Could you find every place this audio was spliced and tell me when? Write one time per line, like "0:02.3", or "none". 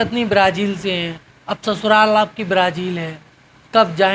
none

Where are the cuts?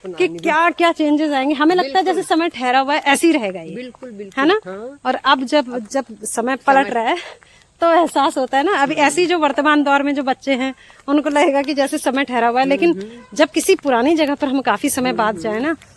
none

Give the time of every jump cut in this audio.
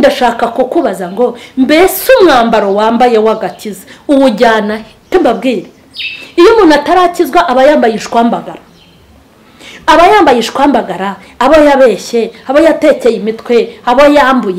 0:05.1

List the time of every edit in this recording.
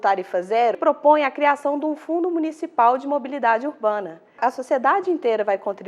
0:00.8
0:04.4

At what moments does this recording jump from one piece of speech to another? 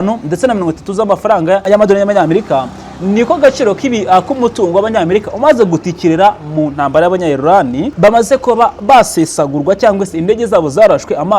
0:01.6
0:07.9

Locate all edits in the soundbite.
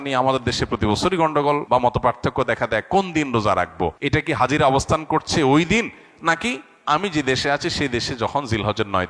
0:01.6
0:04.0

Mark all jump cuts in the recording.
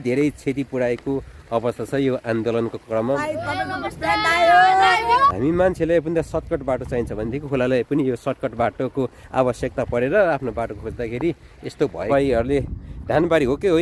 0:03.0
0:05.4
0:12.1

